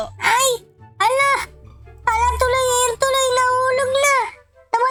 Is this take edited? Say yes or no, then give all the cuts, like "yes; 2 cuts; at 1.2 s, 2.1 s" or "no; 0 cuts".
no; 0 cuts